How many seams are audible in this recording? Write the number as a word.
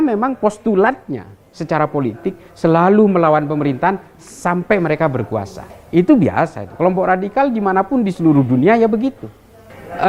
zero